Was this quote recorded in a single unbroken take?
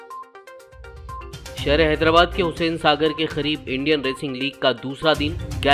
no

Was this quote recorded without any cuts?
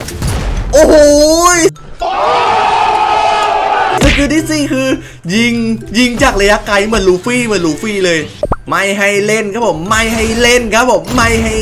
no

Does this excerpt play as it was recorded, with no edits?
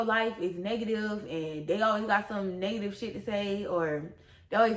yes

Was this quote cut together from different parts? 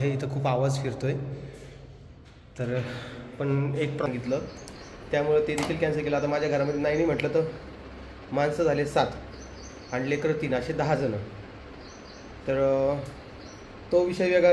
yes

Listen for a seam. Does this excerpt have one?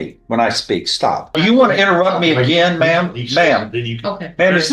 yes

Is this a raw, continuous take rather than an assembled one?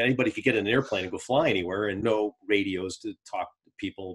no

